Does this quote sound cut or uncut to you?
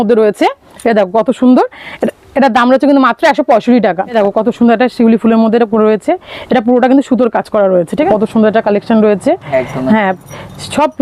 cut